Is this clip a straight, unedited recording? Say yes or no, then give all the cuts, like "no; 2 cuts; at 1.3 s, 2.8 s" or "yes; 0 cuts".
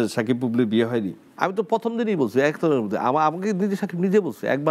yes; 0 cuts